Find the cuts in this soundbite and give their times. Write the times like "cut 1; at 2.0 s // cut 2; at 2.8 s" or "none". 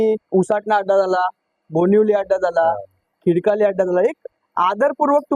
none